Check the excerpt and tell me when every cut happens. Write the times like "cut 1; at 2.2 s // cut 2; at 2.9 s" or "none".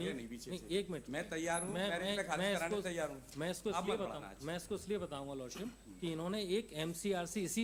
none